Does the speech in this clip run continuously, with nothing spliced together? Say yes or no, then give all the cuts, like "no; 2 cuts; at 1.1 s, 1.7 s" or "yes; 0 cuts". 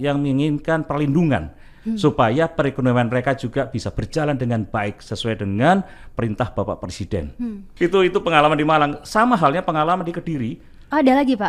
yes; 0 cuts